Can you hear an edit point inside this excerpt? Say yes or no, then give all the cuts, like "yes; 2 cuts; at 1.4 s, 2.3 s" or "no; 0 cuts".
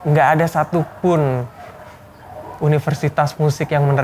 no; 0 cuts